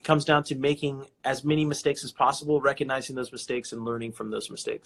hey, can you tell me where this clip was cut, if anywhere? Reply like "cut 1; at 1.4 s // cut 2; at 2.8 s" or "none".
cut 1; at 1.1 s